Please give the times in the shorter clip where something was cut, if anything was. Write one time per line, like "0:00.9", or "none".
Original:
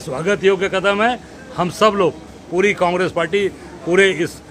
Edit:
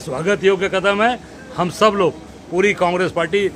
none